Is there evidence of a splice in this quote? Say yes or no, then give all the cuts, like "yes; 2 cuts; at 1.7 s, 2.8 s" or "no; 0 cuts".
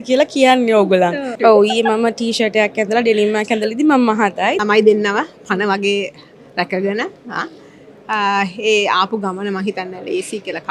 yes; 2 cuts; at 1.3 s, 4.6 s